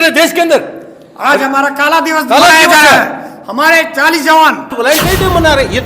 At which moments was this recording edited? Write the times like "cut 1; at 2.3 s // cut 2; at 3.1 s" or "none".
cut 1; at 4.7 s